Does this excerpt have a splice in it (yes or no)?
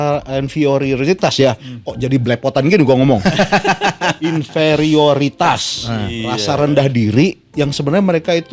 no